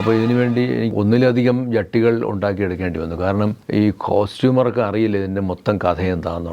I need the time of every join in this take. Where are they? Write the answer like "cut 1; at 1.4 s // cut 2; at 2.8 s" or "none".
cut 1; at 0.9 s // cut 2; at 3.6 s